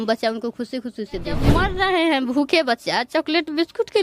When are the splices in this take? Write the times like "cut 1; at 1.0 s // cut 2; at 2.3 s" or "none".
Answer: cut 1; at 1.4 s